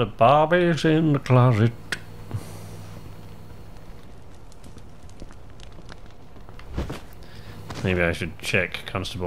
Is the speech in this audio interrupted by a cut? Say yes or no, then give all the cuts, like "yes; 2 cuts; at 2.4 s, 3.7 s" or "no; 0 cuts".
yes; 1 cut; at 7.8 s